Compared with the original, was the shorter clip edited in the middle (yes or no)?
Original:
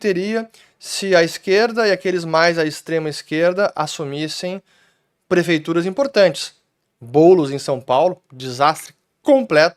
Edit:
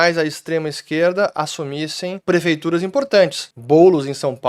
yes